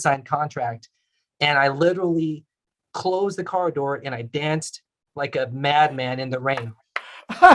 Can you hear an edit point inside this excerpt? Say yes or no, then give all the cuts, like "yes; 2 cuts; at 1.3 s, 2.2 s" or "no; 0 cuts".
no; 0 cuts